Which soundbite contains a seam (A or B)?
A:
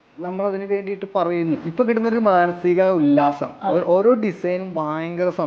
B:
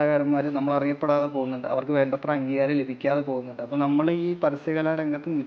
A